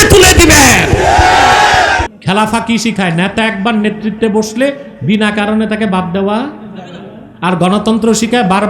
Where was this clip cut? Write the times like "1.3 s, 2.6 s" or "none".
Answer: 2.1 s